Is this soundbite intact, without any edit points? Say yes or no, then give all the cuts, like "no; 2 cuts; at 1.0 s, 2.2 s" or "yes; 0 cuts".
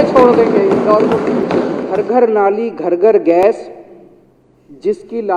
no; 1 cut; at 1.8 s